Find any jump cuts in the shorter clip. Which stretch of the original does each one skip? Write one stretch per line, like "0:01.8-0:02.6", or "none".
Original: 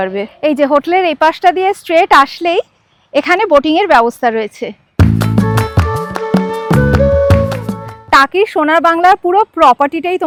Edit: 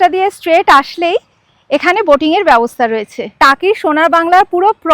0:04.6-0:07.9